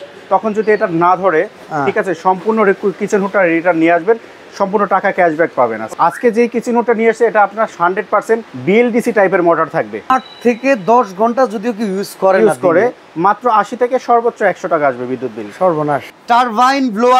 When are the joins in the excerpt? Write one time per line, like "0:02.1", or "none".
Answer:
0:05.9
0:08.5
0:10.1
0:16.1